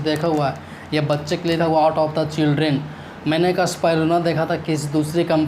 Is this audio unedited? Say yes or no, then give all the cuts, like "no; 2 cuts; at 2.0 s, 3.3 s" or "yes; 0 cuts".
no; 1 cut; at 1.6 s